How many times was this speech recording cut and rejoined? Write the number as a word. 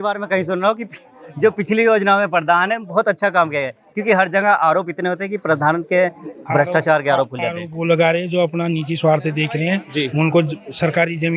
zero